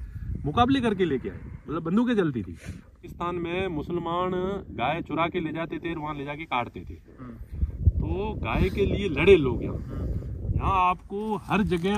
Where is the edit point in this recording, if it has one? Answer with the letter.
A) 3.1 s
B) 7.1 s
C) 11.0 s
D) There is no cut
A